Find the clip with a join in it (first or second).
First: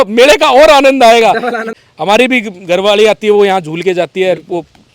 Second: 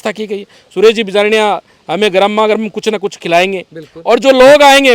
first